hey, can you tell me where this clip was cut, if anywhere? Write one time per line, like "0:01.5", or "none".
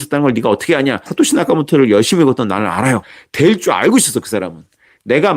0:01.1
0:03.2